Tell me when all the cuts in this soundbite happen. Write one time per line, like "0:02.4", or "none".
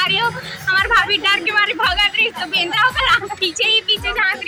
none

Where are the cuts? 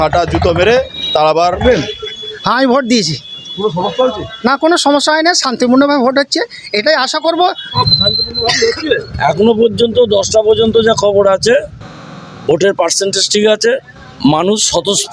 0:01.6
0:07.6

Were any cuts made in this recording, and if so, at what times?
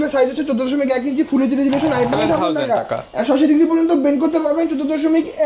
0:02.1

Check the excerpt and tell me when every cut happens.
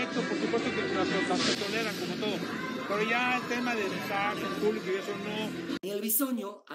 0:05.8

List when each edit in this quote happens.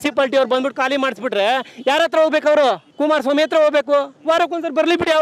0:02.9

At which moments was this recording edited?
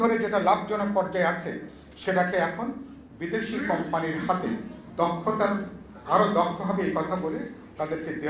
none

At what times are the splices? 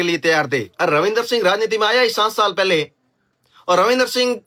none

